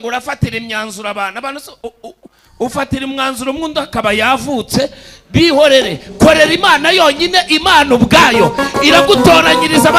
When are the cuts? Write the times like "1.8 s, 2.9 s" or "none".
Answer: none